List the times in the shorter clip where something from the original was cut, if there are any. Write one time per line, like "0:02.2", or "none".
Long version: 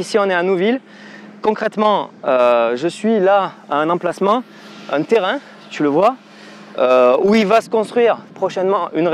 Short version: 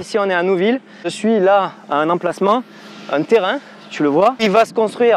0:01.1
0:04.4